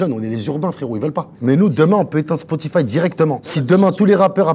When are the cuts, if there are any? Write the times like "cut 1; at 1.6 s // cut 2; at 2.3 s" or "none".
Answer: cut 1; at 1.3 s // cut 2; at 3.5 s